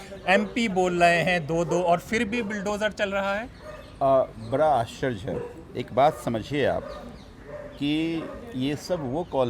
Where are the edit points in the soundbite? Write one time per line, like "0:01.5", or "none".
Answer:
none